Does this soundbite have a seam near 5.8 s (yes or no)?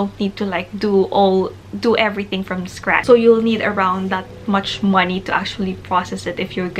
no